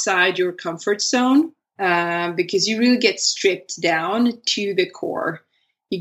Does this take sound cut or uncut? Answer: cut